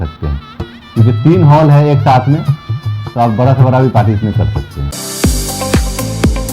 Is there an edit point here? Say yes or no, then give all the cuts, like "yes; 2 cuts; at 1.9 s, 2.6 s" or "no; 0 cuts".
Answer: yes; 1 cut; at 4.9 s